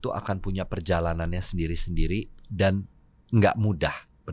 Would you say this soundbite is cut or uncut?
uncut